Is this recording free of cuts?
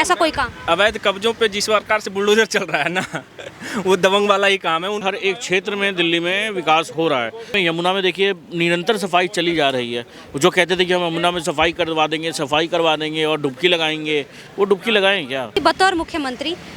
no; 3 cuts; at 5.0 s, 7.5 s, 15.6 s

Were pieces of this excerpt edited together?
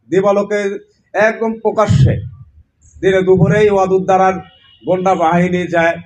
no; 0 cuts

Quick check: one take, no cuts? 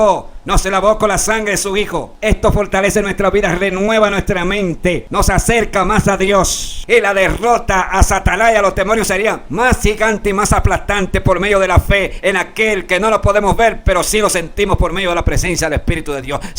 no; 3 cuts; at 2.1 s, 5.0 s, 6.7 s

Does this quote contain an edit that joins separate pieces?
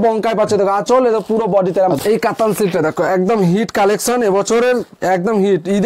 yes; 1 cut; at 2.0 s

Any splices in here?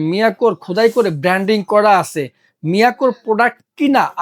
no; 0 cuts

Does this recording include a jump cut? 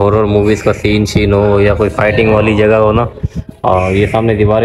no; 0 cuts

